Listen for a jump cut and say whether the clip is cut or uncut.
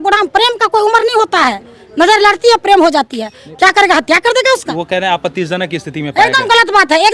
cut